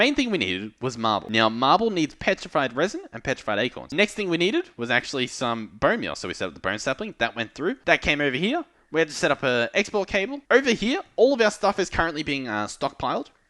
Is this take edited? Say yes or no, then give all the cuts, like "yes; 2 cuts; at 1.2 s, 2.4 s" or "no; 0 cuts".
yes; 4 cuts; at 1.2 s, 3.9 s, 7.8 s, 10.4 s